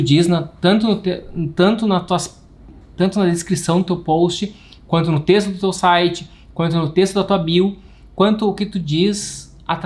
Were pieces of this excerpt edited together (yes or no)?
no